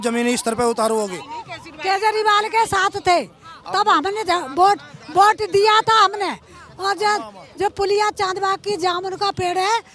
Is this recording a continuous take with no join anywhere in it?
yes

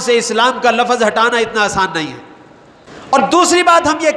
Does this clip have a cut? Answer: no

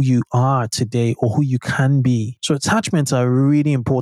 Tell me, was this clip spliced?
yes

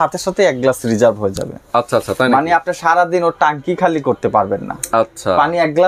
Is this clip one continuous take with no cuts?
yes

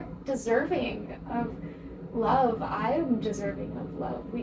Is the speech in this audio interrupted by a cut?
no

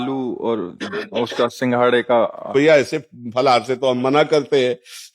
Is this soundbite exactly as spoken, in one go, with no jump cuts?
no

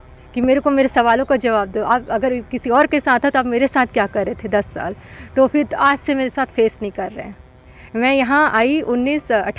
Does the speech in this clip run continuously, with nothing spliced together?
yes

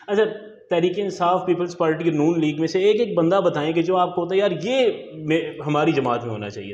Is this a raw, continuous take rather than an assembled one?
yes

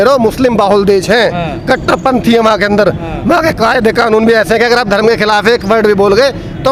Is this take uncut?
yes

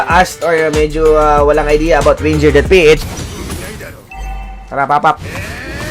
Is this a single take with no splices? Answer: no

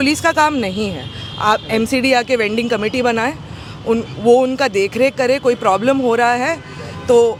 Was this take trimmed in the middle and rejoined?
no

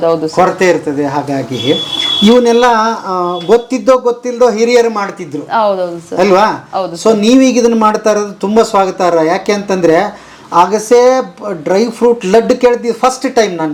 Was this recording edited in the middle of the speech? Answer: no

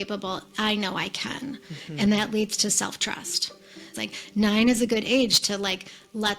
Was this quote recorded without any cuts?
no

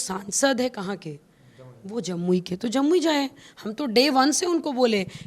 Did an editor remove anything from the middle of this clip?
no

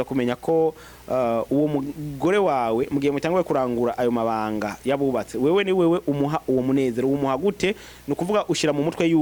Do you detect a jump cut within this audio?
no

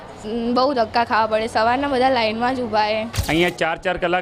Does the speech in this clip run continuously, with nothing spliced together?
no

